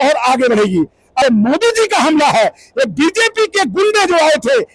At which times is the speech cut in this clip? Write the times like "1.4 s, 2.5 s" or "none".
1.2 s